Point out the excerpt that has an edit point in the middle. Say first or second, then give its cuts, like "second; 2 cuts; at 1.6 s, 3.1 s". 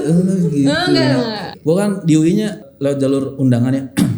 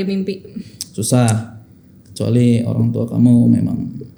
first; 2 cuts; at 1.4 s, 2.6 s